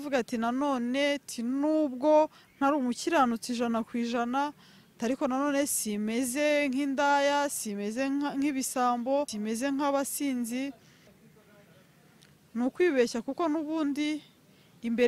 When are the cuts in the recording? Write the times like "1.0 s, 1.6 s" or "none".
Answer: 9.3 s, 11.1 s